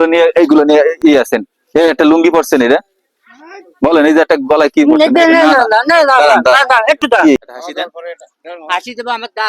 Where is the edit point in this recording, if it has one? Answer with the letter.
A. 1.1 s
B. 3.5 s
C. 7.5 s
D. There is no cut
C